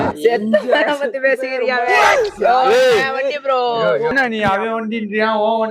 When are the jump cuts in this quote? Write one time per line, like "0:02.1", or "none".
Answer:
0:04.1